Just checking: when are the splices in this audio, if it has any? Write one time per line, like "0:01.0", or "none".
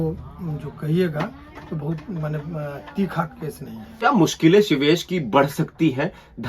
0:04.0